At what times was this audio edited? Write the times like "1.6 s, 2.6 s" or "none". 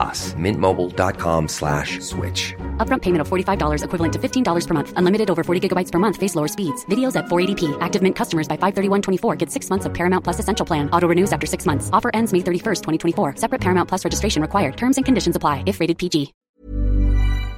16.4 s